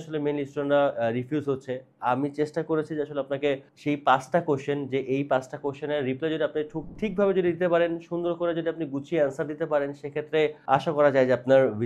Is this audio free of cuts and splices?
yes; 0 cuts

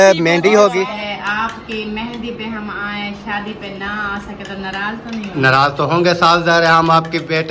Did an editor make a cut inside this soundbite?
yes; 1 cut; at 0.9 s

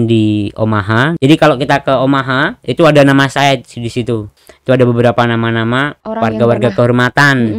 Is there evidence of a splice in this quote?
yes; 3 cuts; at 1.1 s, 4.4 s, 6.0 s

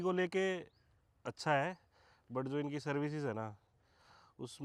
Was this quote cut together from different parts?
no; 0 cuts

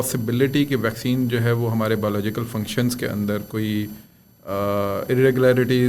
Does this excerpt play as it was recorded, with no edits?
yes; 0 cuts

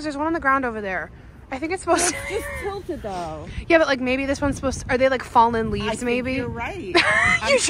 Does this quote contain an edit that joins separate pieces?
no; 0 cuts

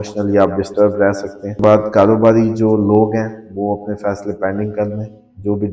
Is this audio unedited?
no; 1 cut; at 1.6 s

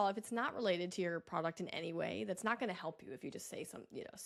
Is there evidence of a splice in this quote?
no; 0 cuts

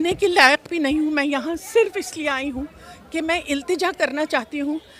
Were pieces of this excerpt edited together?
no; 0 cuts

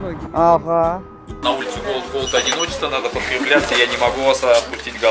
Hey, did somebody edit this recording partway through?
yes; 1 cut; at 1.4 s

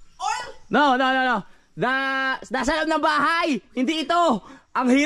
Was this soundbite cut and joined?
no; 0 cuts

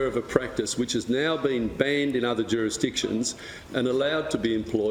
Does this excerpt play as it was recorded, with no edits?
yes; 0 cuts

